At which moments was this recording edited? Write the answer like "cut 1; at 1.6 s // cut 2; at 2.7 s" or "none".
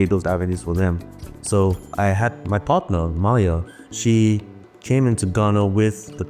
none